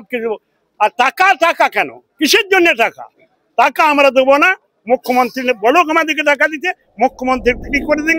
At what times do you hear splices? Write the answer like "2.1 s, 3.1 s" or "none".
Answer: none

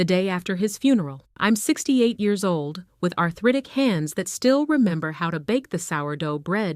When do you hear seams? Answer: 1.2 s

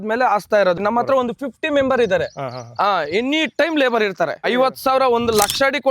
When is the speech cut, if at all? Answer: 0.8 s, 4.5 s

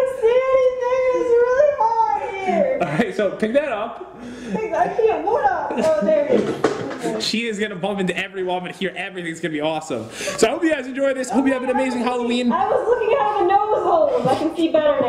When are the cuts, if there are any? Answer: 13.8 s

